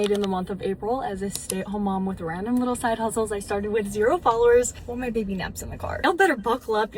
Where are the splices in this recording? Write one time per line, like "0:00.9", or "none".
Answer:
none